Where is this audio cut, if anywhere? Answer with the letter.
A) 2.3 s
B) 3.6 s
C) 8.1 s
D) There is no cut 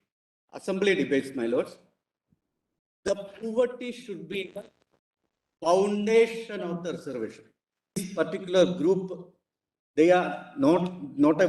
C